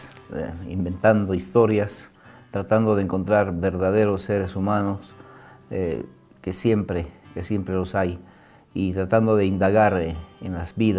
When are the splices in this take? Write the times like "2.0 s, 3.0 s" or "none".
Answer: none